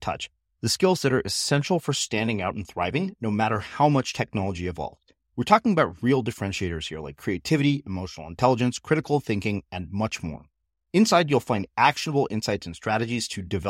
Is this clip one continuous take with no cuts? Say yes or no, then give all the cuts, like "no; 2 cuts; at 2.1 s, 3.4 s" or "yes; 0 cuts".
yes; 0 cuts